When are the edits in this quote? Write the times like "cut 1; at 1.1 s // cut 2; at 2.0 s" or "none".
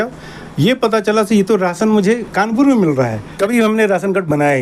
cut 1; at 3.2 s